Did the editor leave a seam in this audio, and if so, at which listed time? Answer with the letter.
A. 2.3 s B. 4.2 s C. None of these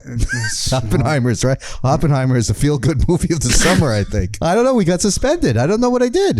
B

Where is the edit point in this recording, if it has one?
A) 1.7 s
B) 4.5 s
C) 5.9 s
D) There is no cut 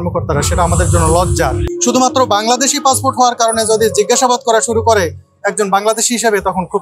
A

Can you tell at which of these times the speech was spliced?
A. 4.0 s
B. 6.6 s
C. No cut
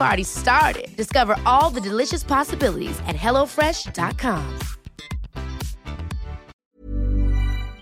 B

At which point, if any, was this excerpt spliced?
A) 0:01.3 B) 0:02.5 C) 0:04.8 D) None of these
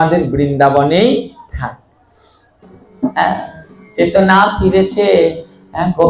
B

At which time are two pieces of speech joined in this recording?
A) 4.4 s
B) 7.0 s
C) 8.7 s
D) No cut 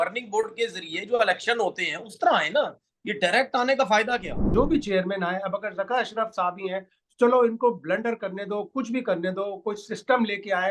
A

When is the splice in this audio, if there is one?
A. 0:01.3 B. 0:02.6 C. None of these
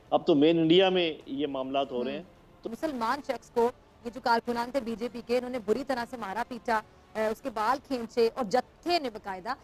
B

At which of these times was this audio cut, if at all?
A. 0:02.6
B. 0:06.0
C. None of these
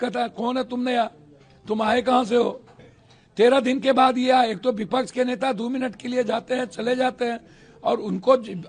C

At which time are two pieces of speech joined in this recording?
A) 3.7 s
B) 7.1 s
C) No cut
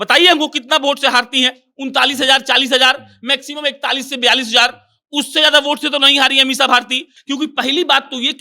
B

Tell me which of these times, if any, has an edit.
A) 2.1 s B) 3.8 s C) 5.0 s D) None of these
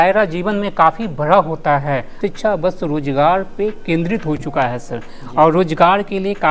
A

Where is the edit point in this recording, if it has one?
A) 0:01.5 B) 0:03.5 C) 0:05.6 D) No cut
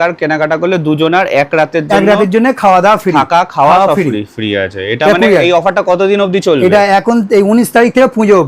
D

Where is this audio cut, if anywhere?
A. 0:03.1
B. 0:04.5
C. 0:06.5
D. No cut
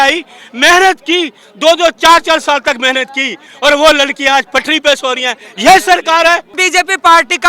C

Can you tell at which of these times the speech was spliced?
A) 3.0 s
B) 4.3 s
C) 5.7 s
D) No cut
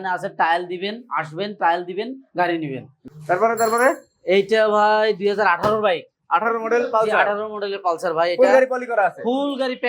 A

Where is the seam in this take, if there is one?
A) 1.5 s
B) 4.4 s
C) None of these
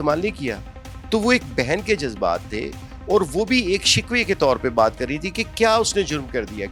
C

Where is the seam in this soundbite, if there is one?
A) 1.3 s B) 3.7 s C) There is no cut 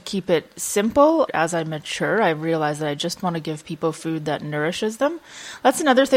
A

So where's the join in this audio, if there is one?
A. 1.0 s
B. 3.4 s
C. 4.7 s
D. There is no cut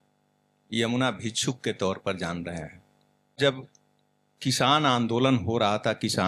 B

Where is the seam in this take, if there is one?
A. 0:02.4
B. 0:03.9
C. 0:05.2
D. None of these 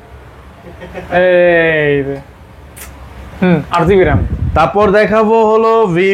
D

